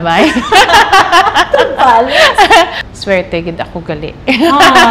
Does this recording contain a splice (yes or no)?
yes